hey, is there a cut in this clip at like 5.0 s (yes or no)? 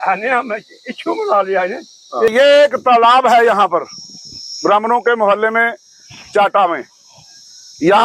no